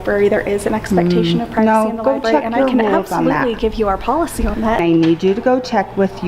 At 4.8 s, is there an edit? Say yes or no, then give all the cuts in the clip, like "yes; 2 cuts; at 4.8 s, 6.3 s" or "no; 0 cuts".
yes; 1 cut; at 4.8 s